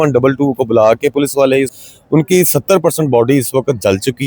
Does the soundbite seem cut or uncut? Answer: cut